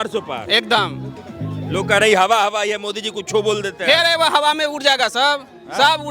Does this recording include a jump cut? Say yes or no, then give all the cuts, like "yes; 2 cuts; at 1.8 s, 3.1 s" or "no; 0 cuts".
no; 0 cuts